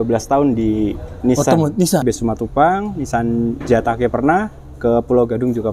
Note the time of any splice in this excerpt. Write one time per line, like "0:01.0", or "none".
0:02.0